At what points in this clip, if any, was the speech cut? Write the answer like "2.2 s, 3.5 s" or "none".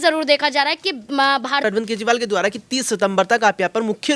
1.6 s